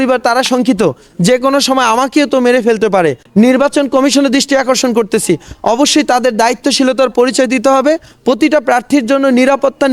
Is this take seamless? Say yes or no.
no